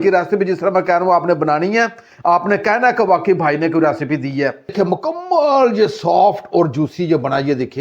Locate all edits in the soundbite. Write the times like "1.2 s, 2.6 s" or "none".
4.7 s